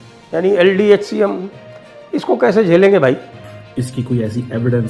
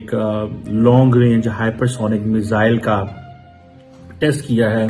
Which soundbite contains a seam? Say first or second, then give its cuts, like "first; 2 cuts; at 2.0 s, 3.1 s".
first; 1 cut; at 3.5 s